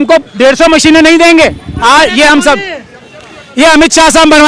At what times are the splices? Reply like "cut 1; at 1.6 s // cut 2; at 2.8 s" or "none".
cut 1; at 1.7 s